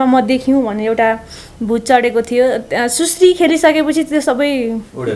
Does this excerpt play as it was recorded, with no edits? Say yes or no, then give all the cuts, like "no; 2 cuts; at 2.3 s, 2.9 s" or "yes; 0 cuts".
yes; 0 cuts